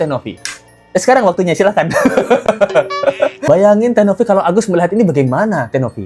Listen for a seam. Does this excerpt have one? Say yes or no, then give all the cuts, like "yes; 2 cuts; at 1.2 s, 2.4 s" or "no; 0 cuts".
yes; 1 cut; at 3.4 s